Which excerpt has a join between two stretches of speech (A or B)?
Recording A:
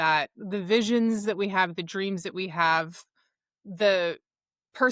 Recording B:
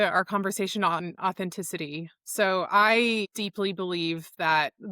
B